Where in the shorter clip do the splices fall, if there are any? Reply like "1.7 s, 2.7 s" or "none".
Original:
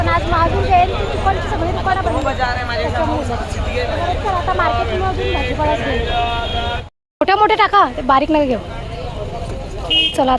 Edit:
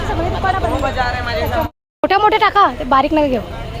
1.7 s